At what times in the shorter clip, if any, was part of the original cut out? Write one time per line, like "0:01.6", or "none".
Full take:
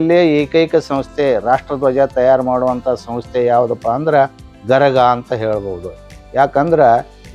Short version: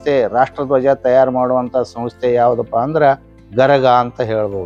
none

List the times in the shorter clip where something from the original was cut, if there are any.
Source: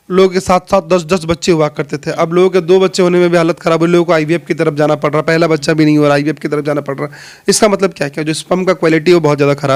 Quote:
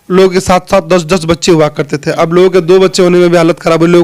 none

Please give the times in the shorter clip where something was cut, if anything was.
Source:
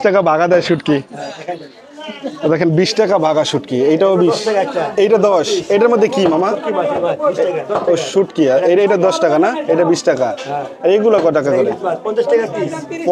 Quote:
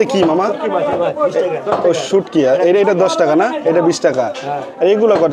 none

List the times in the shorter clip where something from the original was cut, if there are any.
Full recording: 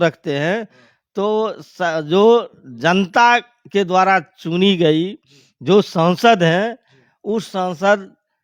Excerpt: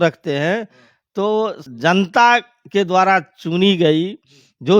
0:01.6

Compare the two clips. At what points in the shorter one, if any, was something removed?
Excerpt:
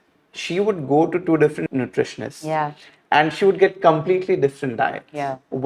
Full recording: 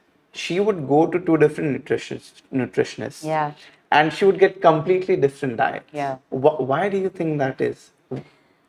0:01.7

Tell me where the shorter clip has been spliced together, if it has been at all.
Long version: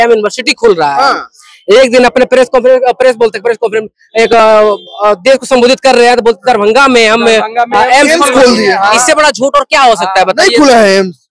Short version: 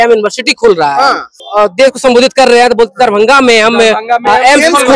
0:01.4

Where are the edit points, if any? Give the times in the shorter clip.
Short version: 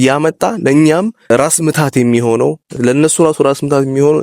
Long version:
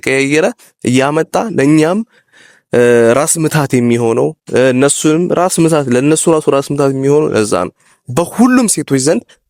0:01.3
0:02.8

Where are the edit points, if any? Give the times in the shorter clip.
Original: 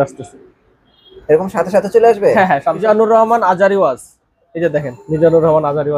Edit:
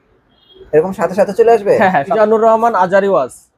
0:02.1

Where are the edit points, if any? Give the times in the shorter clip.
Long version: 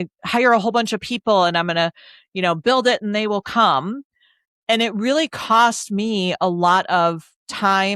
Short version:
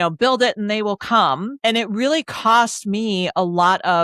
0:01.5

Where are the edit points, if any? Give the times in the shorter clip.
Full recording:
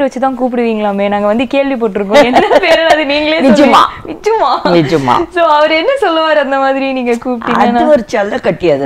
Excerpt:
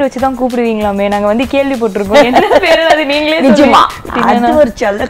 0:04.1

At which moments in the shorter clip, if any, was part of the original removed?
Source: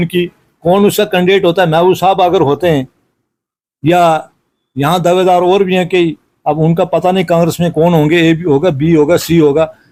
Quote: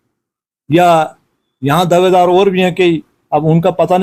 none

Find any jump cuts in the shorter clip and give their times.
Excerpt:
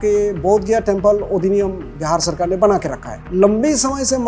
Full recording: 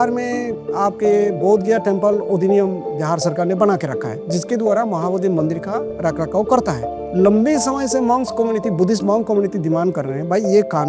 0:03.1

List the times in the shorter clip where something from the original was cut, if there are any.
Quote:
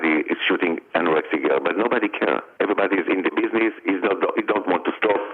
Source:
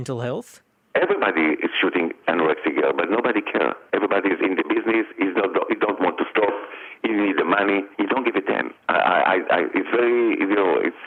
none

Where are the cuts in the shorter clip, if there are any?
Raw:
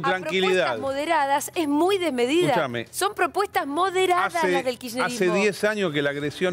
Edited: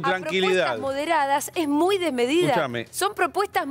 none

